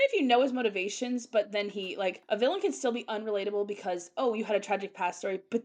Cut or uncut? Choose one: cut